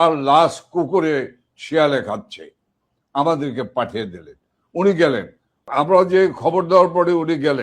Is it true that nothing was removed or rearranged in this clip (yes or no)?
no